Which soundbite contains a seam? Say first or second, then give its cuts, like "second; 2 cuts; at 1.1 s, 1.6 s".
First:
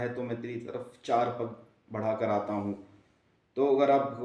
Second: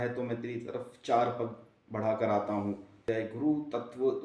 second; 1 cut; at 3.3 s